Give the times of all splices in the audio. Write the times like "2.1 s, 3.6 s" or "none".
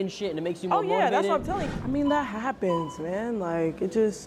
1.5 s